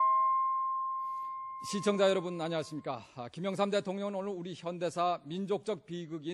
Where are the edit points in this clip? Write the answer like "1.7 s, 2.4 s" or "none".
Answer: 0.9 s